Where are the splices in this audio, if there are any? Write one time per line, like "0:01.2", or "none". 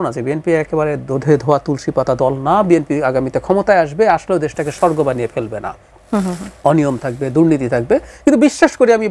none